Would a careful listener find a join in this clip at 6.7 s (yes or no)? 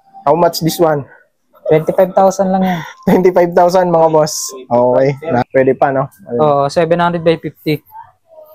no